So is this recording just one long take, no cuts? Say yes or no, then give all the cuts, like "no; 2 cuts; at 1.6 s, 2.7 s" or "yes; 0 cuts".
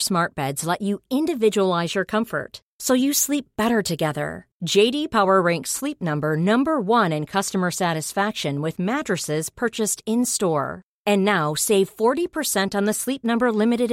yes; 0 cuts